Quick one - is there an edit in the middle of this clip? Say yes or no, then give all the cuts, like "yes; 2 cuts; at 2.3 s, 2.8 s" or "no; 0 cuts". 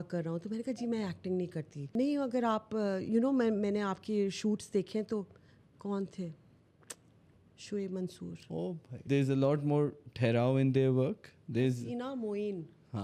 yes; 2 cuts; at 1.9 s, 9.0 s